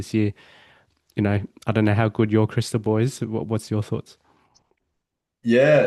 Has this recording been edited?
no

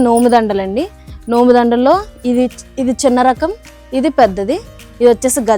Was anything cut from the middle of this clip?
no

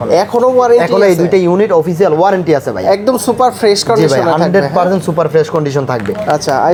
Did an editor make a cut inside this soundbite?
no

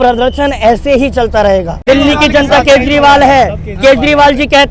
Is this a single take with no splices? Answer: no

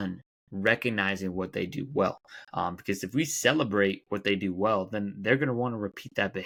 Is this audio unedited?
yes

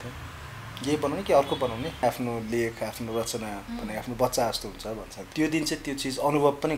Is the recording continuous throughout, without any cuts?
no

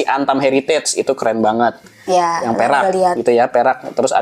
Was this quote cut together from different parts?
no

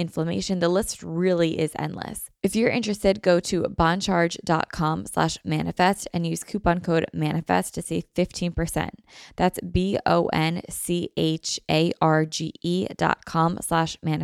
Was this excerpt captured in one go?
no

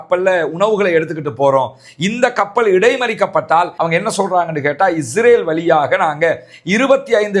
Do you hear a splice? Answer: yes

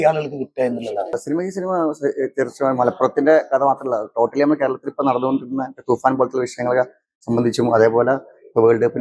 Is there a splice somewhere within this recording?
yes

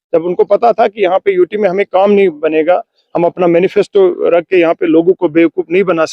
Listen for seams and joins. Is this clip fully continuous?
yes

